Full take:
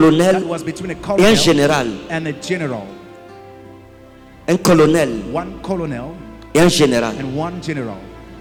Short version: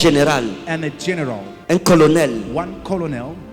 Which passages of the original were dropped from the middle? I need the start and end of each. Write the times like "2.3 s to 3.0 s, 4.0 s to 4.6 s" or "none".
2.9 s to 4.3 s